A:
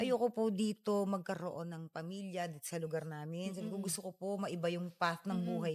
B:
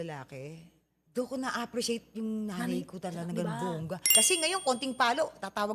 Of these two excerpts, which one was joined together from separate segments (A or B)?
B